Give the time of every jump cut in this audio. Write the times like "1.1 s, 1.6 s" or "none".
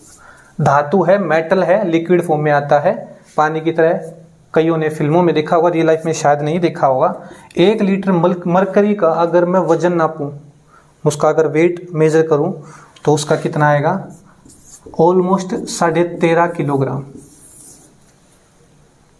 none